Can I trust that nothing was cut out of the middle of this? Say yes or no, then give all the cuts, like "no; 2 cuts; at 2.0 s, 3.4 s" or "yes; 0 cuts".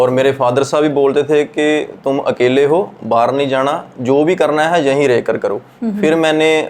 yes; 0 cuts